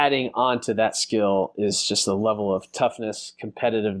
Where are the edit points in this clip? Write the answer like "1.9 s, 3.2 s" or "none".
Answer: none